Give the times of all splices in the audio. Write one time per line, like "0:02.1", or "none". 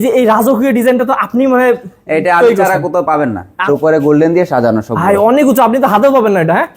0:03.5